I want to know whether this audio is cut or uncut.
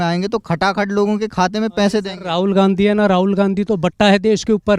uncut